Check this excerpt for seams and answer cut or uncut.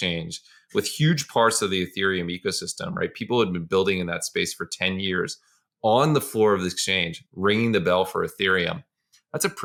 uncut